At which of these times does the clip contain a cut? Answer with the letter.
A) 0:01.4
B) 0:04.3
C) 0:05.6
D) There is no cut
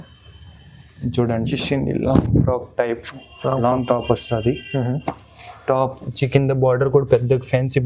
A